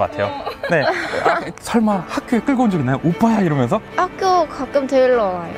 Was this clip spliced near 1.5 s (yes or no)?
yes